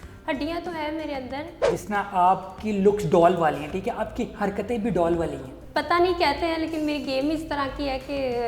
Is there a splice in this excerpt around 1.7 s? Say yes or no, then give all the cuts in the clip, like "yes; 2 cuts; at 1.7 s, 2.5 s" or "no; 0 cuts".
yes; 2 cuts; at 1.7 s, 5.6 s